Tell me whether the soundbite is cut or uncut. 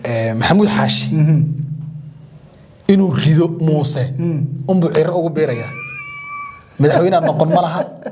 uncut